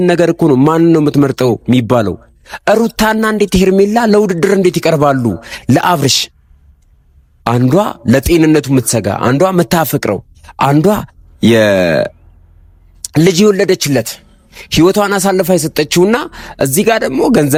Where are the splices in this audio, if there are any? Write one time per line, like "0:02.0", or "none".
none